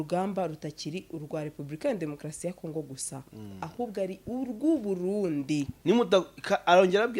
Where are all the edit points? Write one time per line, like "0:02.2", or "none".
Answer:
0:05.7